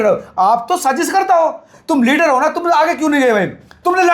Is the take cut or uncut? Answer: cut